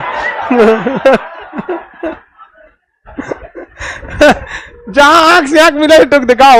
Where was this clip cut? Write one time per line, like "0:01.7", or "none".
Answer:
none